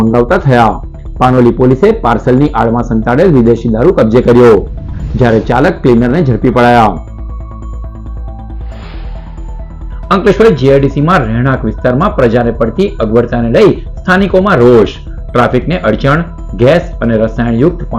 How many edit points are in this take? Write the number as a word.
zero